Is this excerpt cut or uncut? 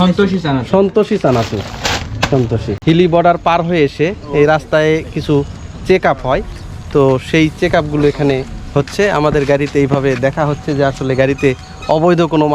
cut